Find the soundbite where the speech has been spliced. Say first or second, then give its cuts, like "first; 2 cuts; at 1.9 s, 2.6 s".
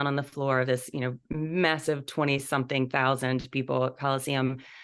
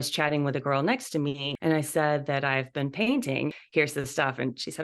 second; 2 cuts; at 1.5 s, 3.5 s